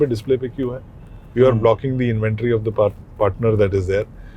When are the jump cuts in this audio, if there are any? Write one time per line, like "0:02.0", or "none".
none